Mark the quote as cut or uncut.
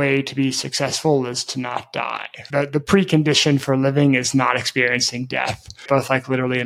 uncut